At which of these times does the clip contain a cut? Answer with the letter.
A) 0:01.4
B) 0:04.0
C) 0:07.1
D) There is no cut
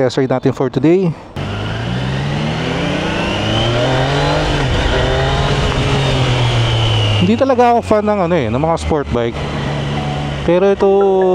A